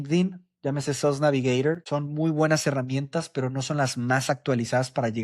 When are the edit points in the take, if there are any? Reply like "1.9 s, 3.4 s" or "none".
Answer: 1.8 s